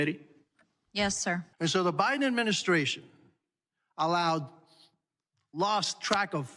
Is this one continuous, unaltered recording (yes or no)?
no